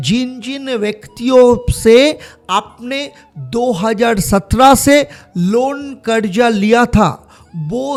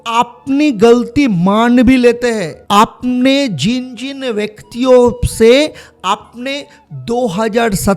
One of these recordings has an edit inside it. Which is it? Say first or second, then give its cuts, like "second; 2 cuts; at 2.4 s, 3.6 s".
second; 1 cut; at 2.6 s